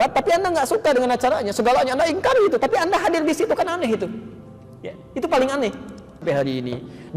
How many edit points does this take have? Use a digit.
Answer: 1